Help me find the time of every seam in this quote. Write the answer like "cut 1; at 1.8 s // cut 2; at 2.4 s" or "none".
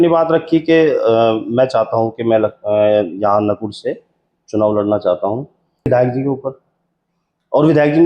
cut 1; at 5.9 s

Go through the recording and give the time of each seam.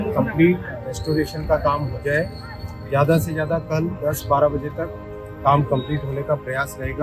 none

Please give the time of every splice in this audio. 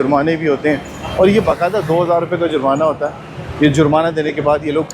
none

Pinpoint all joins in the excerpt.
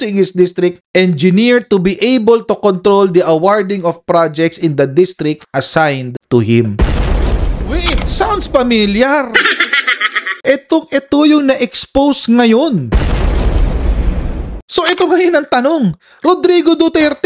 cut 1; at 14.5 s

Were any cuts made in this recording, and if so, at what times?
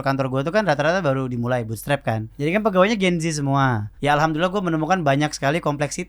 cut 1; at 2.3 s // cut 2; at 3.9 s

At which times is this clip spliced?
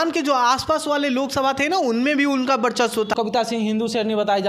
cut 1; at 3.1 s

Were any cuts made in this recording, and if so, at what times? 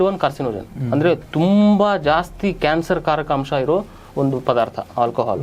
none

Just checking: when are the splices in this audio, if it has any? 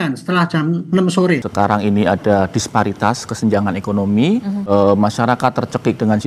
cut 1; at 1.5 s // cut 2; at 4.6 s

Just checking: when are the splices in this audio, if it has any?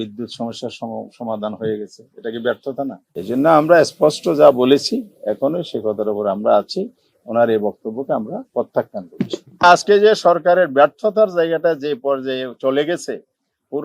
cut 1; at 3.0 s // cut 2; at 9.6 s

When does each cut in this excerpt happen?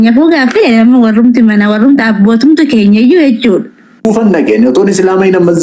cut 1; at 4.0 s

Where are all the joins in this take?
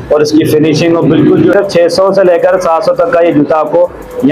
cut 1; at 1.5 s

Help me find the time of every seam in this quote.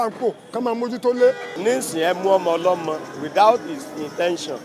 cut 1; at 1.5 s

